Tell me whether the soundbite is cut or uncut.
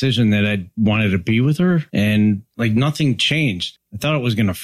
cut